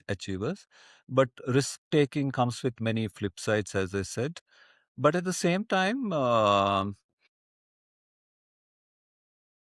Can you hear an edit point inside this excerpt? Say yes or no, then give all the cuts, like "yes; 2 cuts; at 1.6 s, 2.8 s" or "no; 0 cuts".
no; 0 cuts